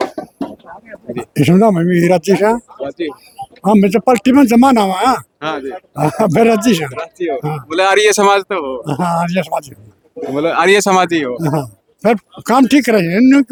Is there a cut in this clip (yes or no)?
no